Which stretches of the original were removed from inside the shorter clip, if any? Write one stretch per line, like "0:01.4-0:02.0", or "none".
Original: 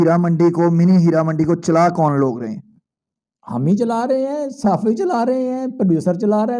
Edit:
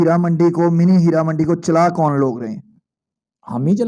none